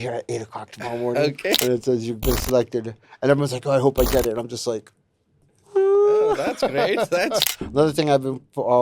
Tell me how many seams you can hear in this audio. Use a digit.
2